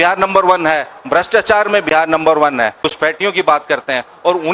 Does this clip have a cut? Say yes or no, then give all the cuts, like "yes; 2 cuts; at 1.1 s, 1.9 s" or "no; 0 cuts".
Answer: yes; 1 cut; at 2.8 s